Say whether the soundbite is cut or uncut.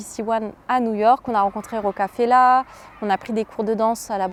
uncut